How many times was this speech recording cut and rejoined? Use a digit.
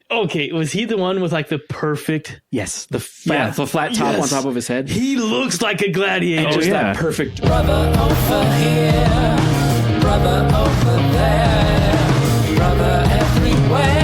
1